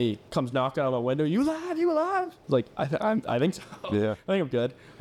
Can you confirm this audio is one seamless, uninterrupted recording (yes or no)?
yes